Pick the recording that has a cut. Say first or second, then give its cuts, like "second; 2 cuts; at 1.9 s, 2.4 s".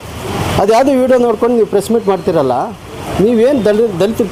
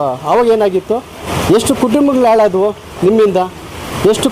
second; 1 cut; at 1.3 s